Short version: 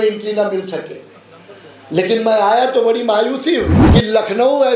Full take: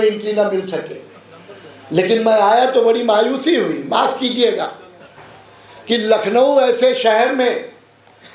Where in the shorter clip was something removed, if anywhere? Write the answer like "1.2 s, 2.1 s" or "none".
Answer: 3.8 s